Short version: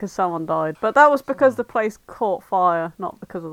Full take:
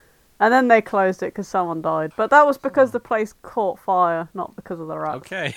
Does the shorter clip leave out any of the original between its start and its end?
no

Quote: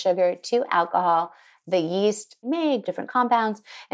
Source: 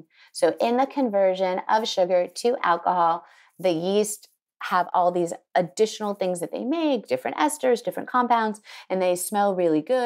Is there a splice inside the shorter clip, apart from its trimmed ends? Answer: yes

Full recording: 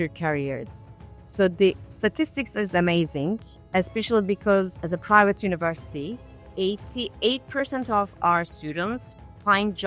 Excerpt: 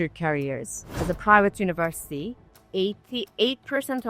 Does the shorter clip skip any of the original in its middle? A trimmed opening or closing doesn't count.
yes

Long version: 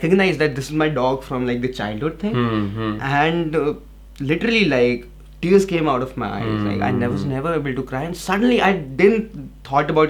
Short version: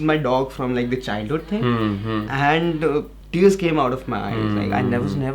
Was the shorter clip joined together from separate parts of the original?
yes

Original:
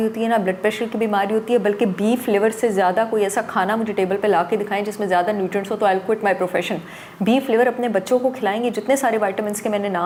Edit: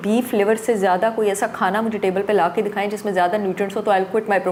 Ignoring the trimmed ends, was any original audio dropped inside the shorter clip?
no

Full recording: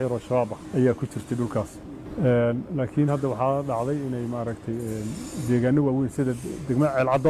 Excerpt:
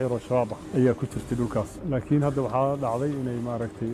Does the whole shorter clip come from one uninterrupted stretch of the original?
no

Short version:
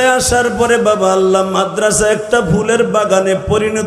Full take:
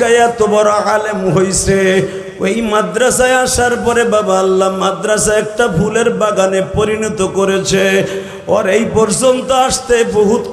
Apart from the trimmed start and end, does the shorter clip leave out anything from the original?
no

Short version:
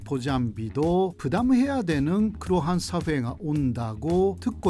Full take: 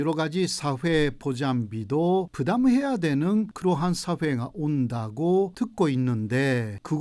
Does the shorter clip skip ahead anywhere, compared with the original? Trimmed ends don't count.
no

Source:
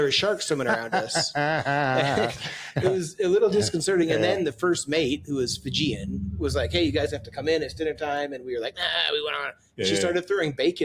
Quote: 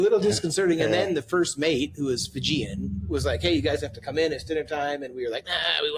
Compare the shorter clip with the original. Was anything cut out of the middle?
no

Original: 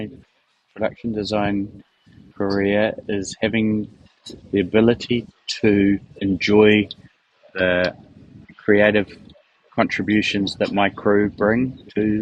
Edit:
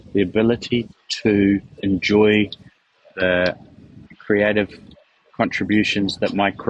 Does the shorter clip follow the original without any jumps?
yes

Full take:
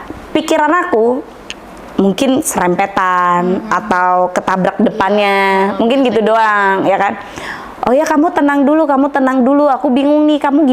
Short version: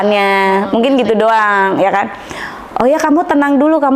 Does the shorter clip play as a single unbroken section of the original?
yes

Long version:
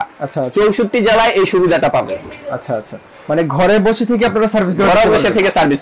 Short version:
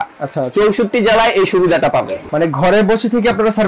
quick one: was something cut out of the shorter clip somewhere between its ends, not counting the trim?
yes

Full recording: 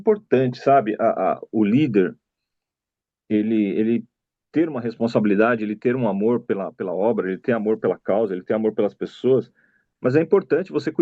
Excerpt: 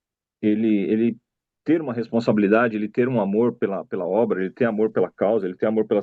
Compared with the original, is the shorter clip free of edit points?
yes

